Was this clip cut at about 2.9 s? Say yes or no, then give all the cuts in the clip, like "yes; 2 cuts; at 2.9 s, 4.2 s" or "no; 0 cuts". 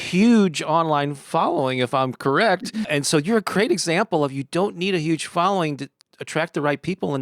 yes; 2 cuts; at 2.9 s, 6.0 s